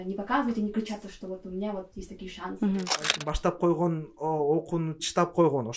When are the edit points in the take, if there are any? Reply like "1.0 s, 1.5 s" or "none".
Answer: 3.2 s